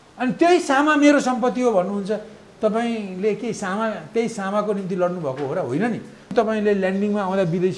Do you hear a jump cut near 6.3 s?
yes; 1 cut; at 6.3 s

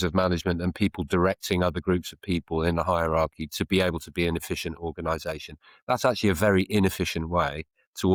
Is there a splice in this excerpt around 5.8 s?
no; 0 cuts

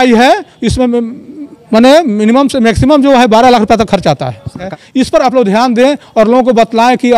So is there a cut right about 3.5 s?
no; 1 cut; at 4.7 s

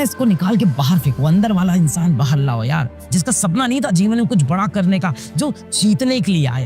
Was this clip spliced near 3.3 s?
no; 1 cut; at 5.6 s

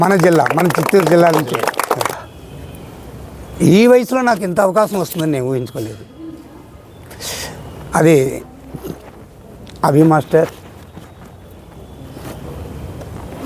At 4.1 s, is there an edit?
no; 1 cut; at 2.1 s

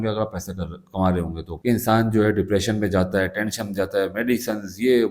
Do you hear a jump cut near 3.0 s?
no; 1 cut; at 1.5 s

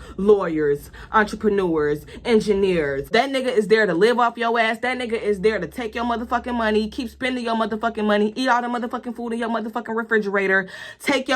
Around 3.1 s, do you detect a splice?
yes; 1 cut; at 3.1 s

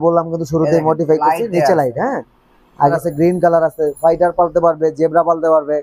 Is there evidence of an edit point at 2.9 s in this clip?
yes; 1 cut; at 2.9 s

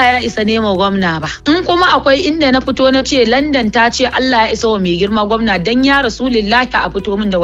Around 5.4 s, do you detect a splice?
no; 1 cut; at 1.3 s

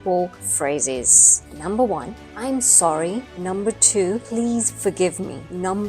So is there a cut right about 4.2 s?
no; 0 cuts

